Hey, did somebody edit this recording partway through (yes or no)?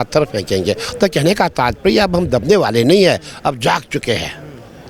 no